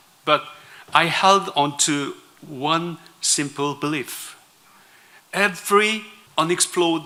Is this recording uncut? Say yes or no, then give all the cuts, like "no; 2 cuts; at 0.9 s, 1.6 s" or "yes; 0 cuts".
yes; 0 cuts